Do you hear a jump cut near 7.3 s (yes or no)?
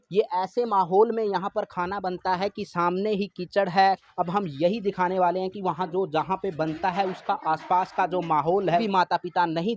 no